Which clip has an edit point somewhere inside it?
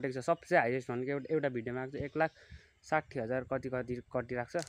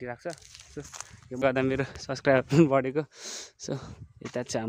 second; 1 cut; at 1.4 s

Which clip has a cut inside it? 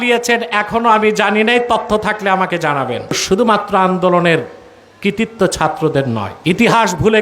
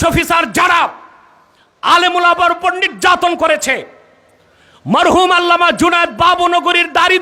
first; 2 cuts; at 3.2 s, 6.3 s

